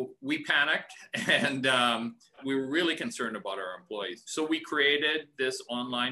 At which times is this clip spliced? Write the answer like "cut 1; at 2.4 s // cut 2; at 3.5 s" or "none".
cut 1; at 2.4 s // cut 2; at 4.2 s